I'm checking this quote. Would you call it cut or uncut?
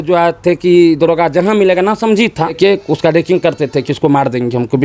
cut